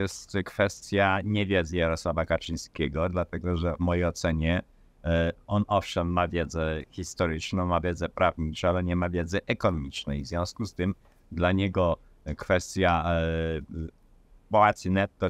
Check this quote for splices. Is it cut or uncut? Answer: uncut